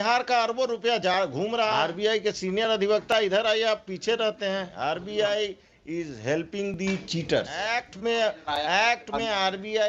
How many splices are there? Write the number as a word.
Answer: three